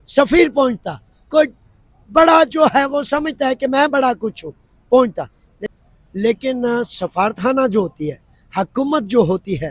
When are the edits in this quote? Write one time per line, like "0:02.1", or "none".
0:05.6